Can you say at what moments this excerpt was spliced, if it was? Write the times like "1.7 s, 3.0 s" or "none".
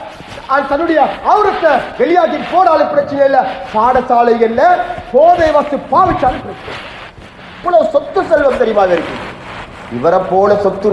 7.6 s